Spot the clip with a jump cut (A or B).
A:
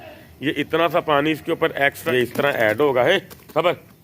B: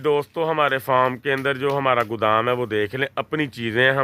A